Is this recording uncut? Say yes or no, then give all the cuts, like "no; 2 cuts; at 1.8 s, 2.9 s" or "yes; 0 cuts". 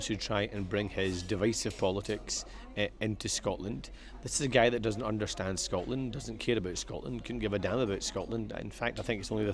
yes; 0 cuts